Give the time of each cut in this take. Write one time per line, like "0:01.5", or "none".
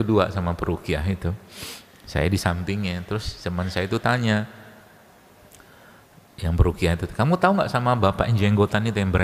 none